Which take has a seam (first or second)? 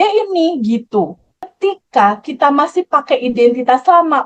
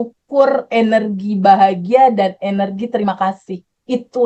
first